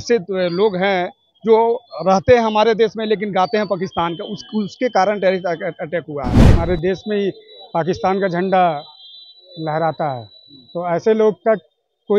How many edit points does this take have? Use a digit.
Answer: 1